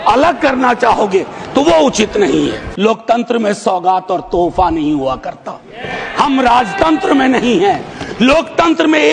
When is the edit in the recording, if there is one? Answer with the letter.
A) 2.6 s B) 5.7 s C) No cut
A